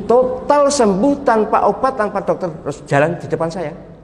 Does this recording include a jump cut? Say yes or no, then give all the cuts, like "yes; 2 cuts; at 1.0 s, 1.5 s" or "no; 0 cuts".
no; 0 cuts